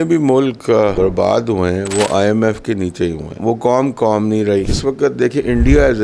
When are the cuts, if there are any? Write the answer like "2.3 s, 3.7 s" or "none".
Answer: 0.9 s, 3.4 s, 4.7 s